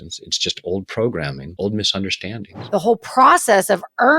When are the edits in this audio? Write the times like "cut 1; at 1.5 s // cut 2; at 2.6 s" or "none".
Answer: cut 1; at 1.4 s // cut 2; at 2.5 s